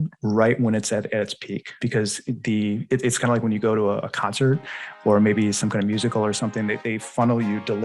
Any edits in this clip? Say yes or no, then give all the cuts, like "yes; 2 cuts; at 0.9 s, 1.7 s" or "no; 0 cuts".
yes; 1 cut; at 1.8 s